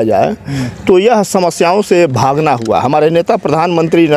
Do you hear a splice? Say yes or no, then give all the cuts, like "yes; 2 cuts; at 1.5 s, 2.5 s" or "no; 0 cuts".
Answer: no; 0 cuts